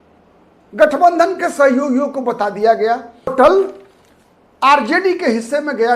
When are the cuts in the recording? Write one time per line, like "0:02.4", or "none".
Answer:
0:03.3